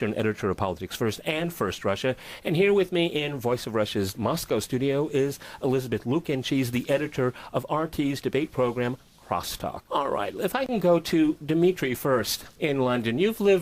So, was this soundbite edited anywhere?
yes; 1 cut; at 5.7 s

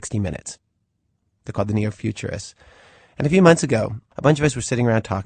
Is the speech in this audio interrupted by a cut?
yes; 1 cut; at 2.4 s

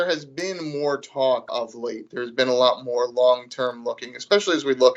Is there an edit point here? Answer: yes; 1 cut; at 1.5 s

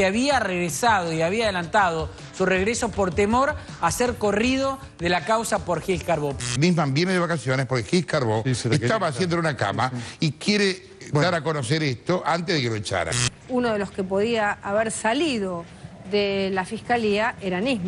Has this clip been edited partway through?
no; 0 cuts

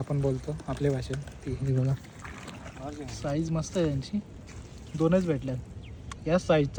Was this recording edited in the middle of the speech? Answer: no; 0 cuts

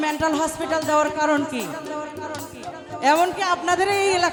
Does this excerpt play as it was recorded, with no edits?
yes; 0 cuts

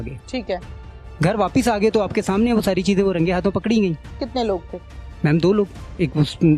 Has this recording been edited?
yes; 2 cuts; at 1.0 s, 4.1 s

